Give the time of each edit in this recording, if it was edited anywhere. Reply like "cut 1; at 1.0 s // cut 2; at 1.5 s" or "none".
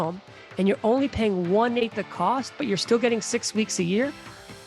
cut 1; at 1.8 s